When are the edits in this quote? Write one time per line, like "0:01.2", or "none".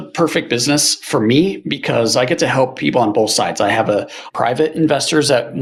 none

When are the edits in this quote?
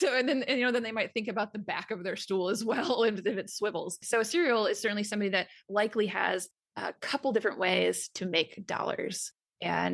0:04.0

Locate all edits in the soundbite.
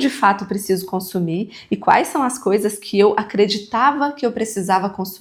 none

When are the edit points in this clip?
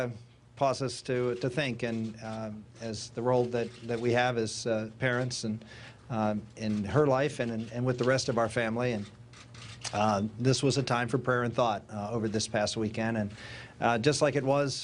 0:10.5

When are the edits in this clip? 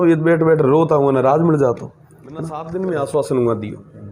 0:02.6

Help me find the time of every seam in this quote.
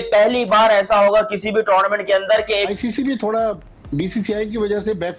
0:02.7

